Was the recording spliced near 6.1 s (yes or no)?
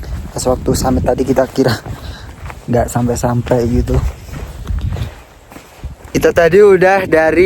yes